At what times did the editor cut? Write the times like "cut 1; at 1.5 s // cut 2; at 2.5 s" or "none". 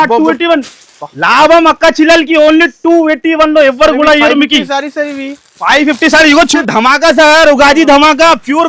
cut 1; at 6.5 s